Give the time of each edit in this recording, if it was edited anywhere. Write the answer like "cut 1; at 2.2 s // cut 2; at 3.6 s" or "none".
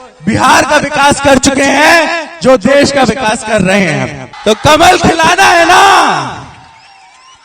cut 1; at 4.2 s